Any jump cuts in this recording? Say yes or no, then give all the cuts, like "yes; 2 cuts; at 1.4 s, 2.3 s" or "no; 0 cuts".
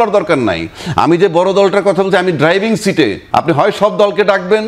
yes; 1 cut; at 3.2 s